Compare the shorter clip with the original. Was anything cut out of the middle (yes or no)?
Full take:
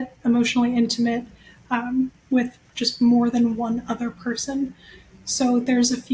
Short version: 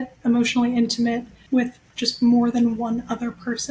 yes